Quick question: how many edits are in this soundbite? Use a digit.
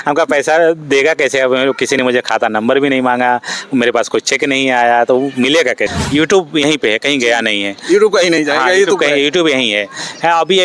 1